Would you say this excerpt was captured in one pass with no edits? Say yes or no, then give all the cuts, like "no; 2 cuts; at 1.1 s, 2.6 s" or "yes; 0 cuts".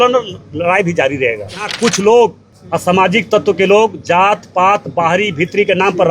no; 2 cuts; at 1.7 s, 2.5 s